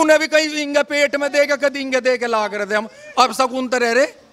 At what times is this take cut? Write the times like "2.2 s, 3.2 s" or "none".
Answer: none

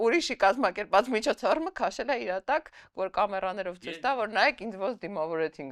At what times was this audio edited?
none

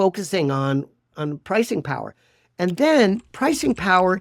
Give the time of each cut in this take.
1.1 s

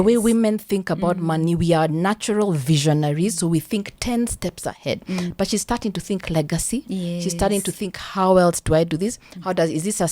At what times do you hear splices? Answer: 5.3 s

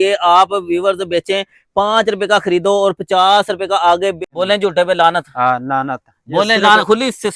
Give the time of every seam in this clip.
4.3 s

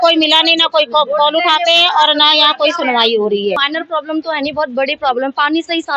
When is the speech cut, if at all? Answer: none

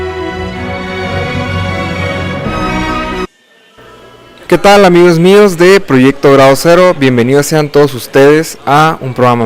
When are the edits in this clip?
none

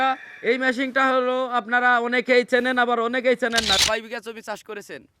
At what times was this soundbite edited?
3.8 s

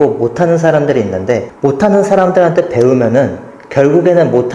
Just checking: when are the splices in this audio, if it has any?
1.5 s

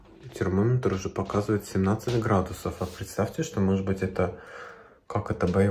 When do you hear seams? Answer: none

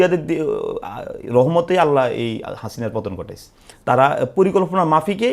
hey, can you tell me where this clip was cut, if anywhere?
3.6 s

